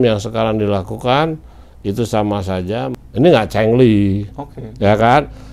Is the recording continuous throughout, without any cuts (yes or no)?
no